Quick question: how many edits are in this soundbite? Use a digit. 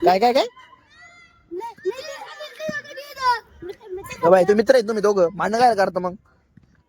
0